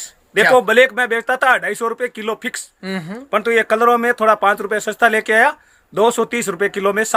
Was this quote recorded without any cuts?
yes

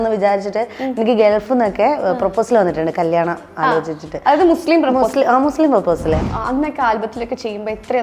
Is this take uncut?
no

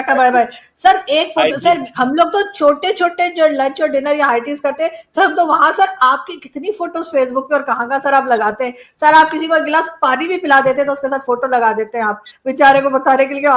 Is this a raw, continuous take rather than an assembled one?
yes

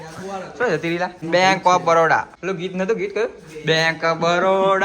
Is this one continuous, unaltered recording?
no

